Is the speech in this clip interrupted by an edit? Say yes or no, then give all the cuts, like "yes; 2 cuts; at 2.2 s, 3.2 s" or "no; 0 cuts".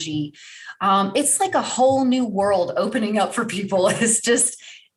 no; 0 cuts